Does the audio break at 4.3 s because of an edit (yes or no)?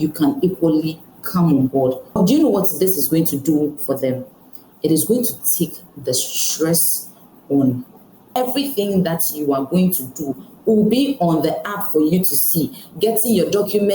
no